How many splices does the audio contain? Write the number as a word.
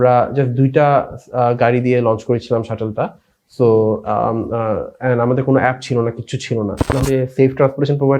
one